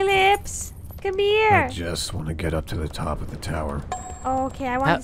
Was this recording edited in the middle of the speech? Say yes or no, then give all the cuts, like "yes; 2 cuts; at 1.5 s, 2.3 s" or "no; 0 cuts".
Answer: no; 0 cuts